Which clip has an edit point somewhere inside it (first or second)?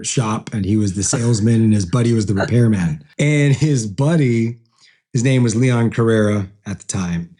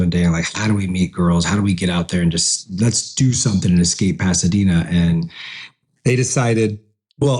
first